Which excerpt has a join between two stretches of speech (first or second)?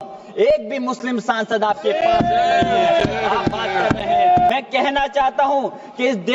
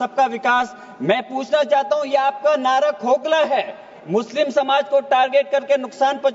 first